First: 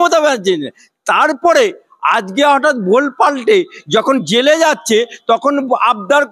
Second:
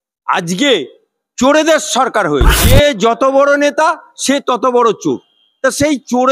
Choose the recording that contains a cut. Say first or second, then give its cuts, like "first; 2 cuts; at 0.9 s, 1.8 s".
second; 1 cut; at 2.6 s